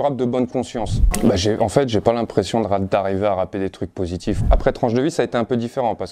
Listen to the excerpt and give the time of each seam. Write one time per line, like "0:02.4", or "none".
0:01.0
0:04.4